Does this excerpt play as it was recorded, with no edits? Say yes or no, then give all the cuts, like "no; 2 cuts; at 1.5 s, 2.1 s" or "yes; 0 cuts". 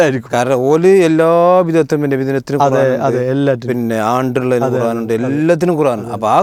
yes; 0 cuts